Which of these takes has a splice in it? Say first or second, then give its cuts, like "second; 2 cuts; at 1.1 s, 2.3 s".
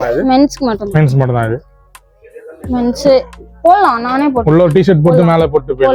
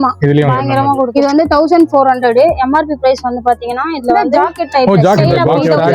second; 2 cuts; at 1.1 s, 4.3 s